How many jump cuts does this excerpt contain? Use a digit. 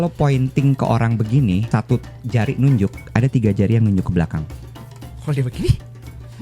2